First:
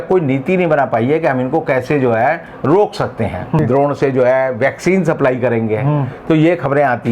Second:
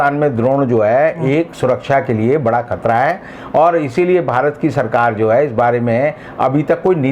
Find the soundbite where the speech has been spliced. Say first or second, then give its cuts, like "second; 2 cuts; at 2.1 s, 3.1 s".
first; 1 cut; at 3.6 s